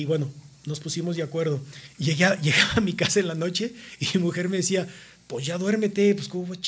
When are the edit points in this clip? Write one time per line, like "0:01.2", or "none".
none